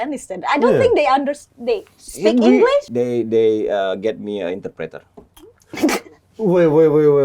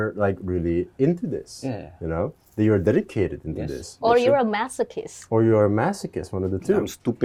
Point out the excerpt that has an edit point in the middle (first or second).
first